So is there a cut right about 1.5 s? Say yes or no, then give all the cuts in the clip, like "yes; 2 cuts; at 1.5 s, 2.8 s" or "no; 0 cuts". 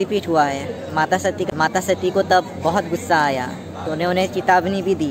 yes; 1 cut; at 1.5 s